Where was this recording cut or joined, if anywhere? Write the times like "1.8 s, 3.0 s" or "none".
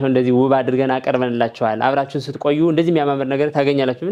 none